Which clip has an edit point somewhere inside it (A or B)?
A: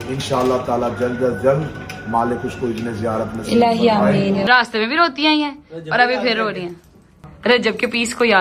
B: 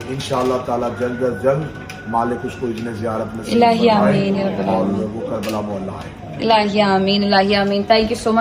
A